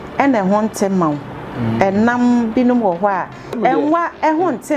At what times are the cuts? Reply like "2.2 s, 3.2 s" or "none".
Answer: 3.6 s